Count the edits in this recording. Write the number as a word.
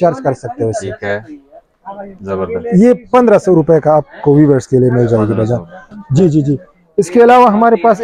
zero